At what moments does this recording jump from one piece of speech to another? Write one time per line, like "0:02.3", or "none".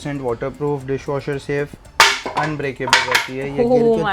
none